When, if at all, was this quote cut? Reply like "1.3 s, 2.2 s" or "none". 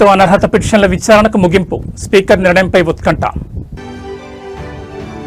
none